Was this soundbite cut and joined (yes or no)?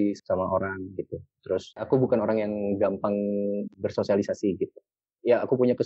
yes